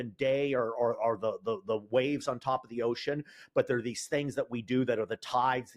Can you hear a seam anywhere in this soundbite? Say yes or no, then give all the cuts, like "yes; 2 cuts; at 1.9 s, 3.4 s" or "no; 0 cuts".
no; 0 cuts